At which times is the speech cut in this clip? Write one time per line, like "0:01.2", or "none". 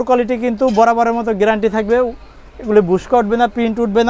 none